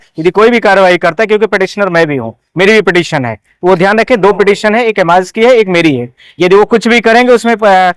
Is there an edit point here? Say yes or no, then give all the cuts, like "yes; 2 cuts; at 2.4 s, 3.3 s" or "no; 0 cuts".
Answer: no; 0 cuts